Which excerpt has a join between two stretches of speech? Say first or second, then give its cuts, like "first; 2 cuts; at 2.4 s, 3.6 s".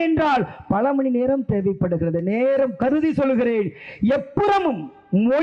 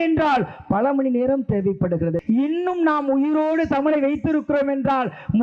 second; 1 cut; at 2.2 s